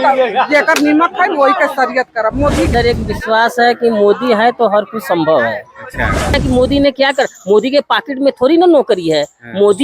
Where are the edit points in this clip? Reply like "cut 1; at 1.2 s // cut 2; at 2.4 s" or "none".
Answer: cut 1; at 2.7 s // cut 2; at 6.4 s